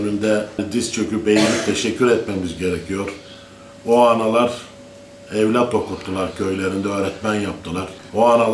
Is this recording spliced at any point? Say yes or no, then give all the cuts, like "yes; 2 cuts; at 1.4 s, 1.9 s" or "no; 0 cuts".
no; 0 cuts